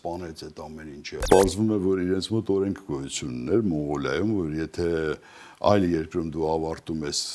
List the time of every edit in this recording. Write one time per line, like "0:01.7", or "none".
0:01.2